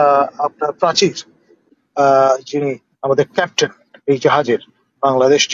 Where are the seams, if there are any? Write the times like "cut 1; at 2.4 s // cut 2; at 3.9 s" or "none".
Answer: cut 1; at 1.6 s